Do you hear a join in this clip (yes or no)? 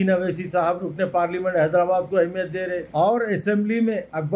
yes